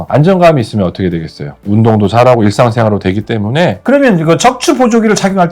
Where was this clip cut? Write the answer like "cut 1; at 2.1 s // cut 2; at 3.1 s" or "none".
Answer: cut 1; at 3.8 s